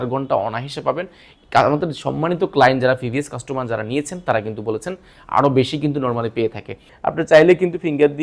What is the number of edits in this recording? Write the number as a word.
one